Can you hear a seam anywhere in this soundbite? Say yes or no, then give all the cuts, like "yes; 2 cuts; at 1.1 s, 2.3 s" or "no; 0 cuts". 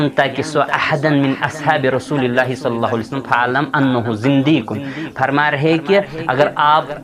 no; 0 cuts